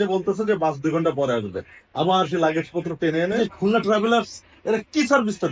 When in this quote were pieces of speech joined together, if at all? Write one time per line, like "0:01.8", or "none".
0:03.4